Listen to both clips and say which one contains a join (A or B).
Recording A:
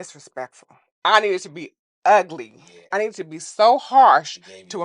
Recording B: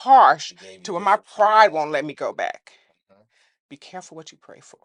A